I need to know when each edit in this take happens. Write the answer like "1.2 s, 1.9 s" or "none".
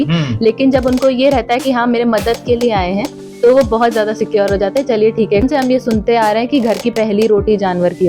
5.4 s

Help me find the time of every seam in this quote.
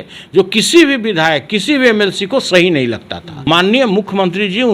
3.3 s

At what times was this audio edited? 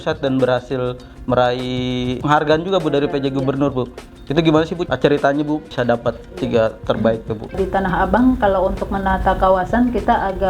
2.2 s, 4.8 s, 5.7 s, 7.5 s

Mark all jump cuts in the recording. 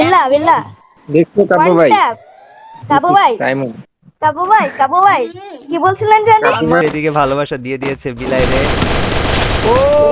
6.8 s

